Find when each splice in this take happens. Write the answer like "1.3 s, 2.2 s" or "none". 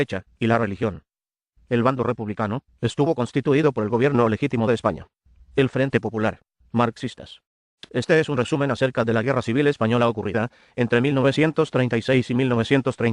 none